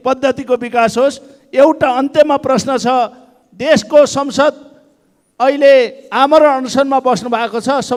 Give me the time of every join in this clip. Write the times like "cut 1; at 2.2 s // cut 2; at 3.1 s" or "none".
none